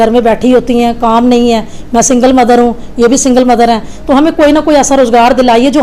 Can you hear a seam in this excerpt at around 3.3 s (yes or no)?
no